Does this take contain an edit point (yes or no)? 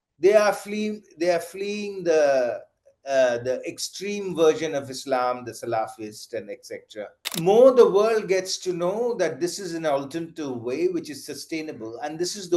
yes